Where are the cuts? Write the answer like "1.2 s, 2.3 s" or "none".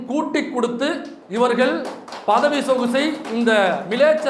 1.1 s